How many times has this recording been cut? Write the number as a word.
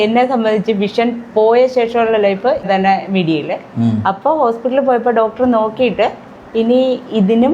one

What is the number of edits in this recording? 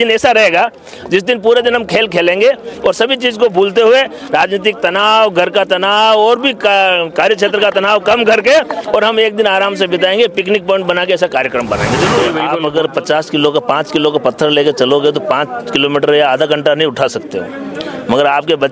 one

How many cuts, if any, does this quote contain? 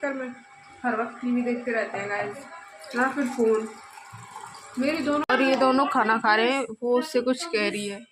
one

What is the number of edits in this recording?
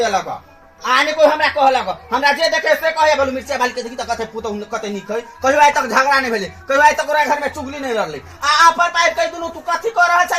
zero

